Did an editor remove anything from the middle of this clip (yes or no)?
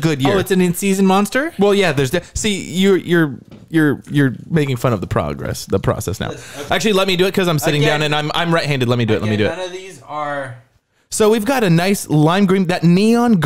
yes